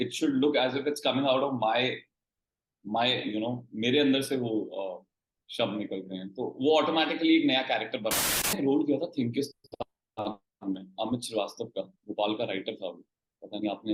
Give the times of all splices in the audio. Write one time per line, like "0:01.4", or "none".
0:08.6